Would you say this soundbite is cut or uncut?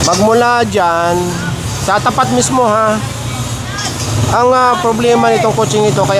uncut